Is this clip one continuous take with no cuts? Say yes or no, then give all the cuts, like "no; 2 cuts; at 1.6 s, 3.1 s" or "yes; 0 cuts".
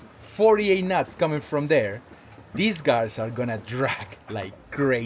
yes; 0 cuts